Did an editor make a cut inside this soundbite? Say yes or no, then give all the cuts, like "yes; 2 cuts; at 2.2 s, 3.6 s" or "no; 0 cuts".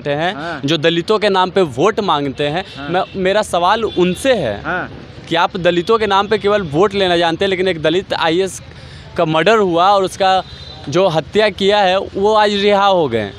no; 0 cuts